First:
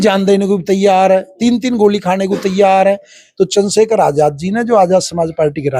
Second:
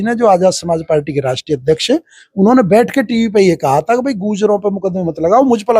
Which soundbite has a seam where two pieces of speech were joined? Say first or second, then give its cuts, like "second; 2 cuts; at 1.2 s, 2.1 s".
first; 1 cut; at 3.2 s